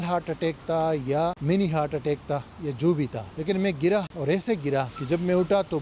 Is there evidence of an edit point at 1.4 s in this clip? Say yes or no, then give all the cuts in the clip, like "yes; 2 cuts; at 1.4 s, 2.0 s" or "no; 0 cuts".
yes; 4 cuts; at 1.4 s, 3.3 s, 4.1 s, 5.0 s